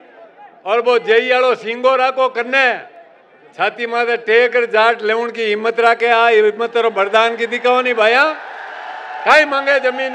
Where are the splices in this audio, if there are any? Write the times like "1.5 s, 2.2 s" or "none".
none